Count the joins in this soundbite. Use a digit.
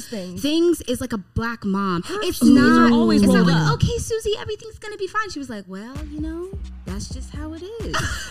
0